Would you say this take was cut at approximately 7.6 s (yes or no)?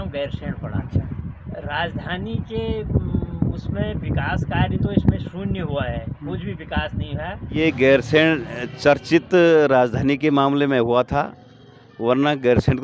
yes